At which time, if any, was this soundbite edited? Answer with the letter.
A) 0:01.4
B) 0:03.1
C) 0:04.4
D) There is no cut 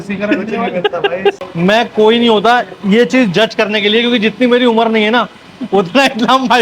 A